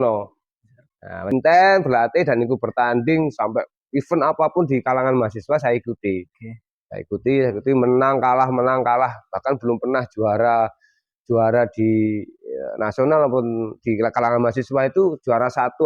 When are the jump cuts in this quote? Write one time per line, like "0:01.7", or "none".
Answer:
0:01.2